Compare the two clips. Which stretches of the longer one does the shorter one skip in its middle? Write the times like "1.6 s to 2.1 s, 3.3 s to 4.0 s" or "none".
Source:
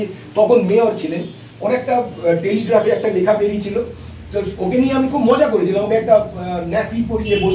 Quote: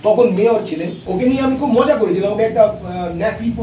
1.4 s to 4.6 s